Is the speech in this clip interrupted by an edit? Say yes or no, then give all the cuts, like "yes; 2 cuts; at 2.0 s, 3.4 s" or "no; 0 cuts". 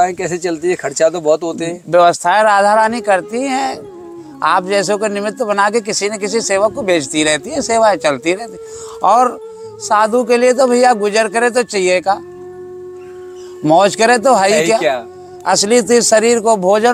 no; 0 cuts